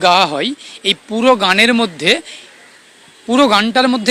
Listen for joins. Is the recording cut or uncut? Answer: uncut